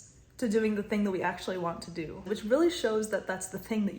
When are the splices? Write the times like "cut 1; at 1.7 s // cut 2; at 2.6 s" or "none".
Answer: cut 1; at 2.3 s